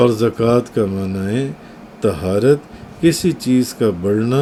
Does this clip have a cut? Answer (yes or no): no